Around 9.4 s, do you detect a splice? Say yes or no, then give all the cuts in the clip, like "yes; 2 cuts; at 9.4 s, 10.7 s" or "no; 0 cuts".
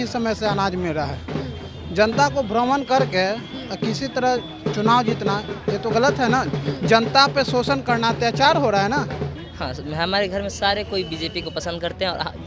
yes; 1 cut; at 9.4 s